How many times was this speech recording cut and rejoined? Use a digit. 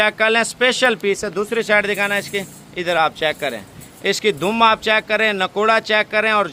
0